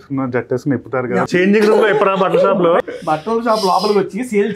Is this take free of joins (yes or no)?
no